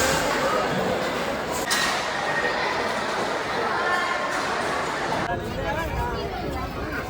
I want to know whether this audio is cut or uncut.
cut